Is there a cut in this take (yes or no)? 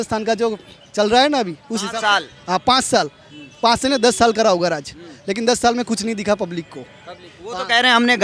no